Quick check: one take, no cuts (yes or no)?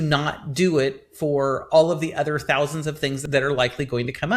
no